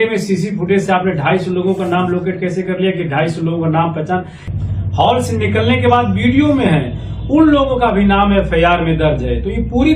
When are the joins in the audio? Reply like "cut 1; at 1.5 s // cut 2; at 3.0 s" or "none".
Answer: cut 1; at 4.4 s